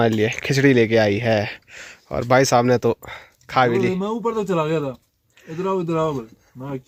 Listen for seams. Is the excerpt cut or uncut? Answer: uncut